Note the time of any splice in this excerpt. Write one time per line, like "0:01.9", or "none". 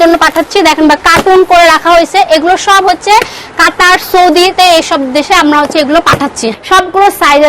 0:06.4